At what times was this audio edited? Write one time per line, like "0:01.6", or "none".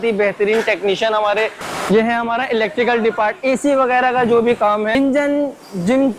0:01.5
0:05.0